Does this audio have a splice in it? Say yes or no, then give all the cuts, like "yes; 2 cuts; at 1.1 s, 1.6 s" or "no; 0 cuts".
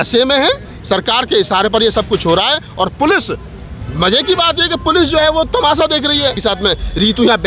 yes; 1 cut; at 6.4 s